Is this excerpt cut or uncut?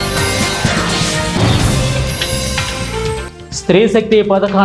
cut